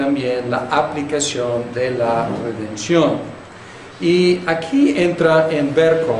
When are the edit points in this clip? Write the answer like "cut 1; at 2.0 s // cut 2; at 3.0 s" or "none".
cut 1; at 4.9 s